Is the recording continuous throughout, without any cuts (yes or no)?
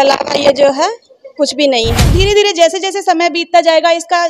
no